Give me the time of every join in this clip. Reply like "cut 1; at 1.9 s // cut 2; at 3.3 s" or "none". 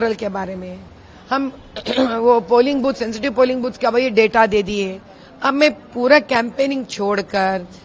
none

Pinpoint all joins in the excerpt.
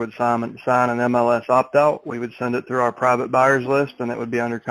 none

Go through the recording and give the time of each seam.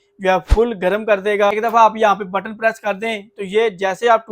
cut 1; at 1.6 s

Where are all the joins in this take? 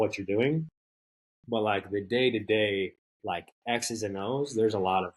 cut 1; at 3.1 s

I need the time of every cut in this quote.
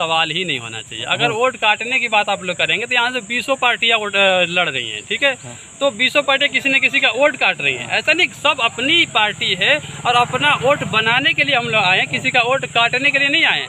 none

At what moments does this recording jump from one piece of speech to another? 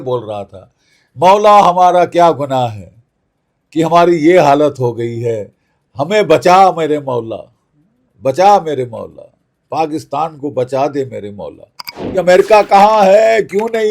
cut 1; at 12.1 s

